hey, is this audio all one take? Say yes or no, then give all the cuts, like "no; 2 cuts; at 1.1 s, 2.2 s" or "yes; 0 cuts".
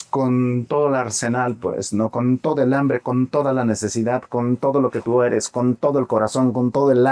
yes; 0 cuts